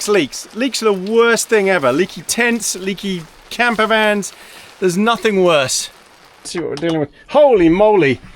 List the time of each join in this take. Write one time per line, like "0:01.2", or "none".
0:06.5